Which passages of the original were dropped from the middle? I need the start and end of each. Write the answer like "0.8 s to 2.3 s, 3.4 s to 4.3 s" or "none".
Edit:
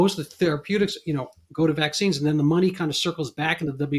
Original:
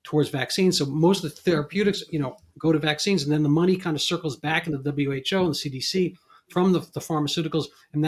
none